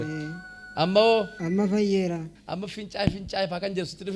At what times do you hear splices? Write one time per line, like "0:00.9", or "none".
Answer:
0:01.4
0:02.3